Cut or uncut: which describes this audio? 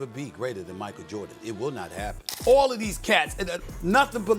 cut